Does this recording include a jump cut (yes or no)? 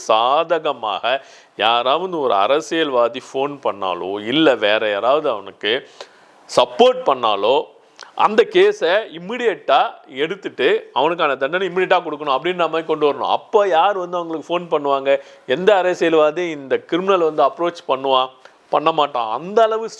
no